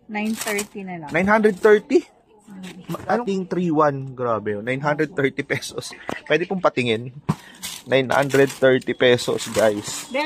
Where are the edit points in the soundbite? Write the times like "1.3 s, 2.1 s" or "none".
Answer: 3.2 s